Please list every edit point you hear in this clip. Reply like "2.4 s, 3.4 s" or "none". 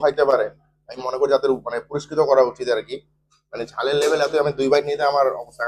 none